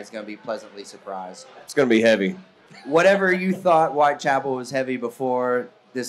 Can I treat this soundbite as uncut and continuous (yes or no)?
no